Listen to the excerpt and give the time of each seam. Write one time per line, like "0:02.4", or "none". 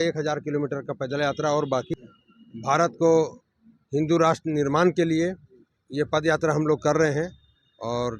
0:01.9